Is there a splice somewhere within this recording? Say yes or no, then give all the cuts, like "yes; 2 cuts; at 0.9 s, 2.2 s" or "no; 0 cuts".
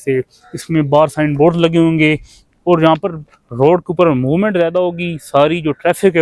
no; 0 cuts